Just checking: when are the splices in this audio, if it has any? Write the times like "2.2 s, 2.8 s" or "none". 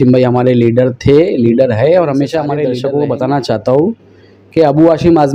2.6 s

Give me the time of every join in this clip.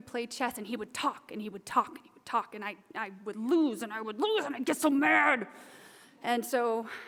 none

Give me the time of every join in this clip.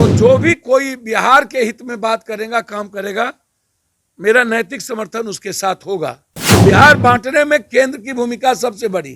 6.3 s

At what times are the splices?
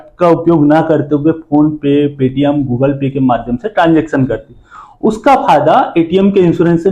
none

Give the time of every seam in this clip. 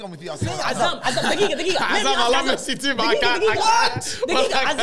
none

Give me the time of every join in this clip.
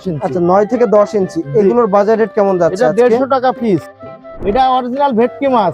4.3 s

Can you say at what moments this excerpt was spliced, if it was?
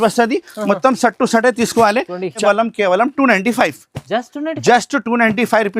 2.4 s

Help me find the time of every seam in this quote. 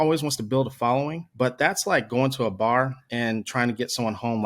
1.2 s

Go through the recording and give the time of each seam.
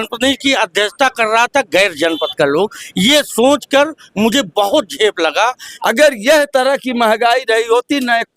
5.7 s

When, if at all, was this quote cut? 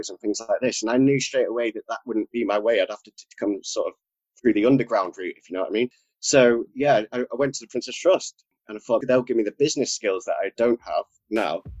none

